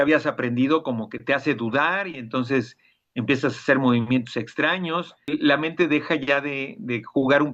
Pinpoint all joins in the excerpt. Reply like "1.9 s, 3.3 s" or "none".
5.3 s